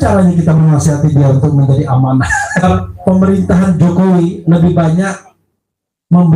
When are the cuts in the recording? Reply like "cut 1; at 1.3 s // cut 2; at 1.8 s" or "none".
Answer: cut 1; at 2.6 s